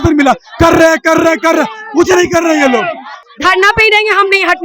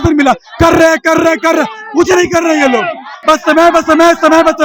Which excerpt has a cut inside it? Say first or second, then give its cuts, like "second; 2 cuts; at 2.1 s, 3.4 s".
first; 1 cut; at 3.0 s